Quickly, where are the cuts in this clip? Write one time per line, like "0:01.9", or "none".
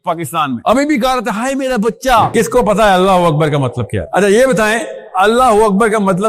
0:02.3